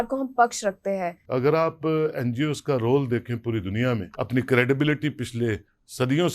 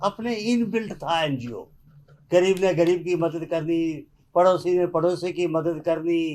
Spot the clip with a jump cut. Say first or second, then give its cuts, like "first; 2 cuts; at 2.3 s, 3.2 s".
first; 2 cuts; at 1.2 s, 4.1 s